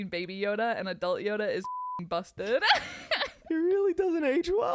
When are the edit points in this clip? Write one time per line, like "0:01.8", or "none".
0:03.4

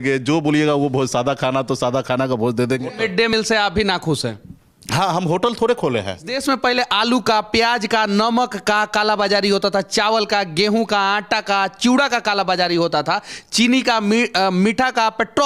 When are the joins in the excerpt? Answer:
0:03.3
0:06.3

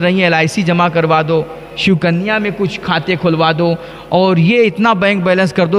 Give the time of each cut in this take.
none

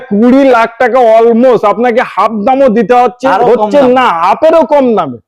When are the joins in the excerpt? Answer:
none

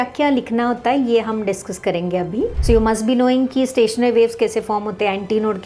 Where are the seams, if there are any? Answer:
0:02.6

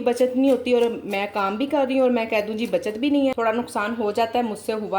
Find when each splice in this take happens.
0:03.3

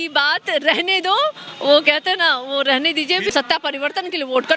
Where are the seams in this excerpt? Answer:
0:03.3

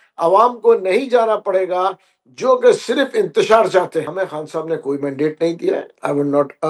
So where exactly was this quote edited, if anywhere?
0:04.1

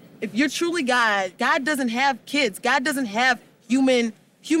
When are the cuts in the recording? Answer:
0:01.3

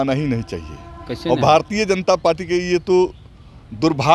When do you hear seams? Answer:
none

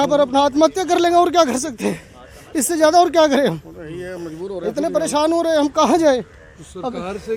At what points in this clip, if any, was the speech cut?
none

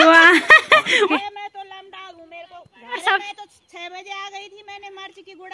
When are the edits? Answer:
0:01.1
0:03.0

